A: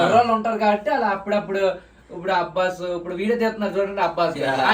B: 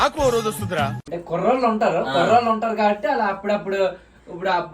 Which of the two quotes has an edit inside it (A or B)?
B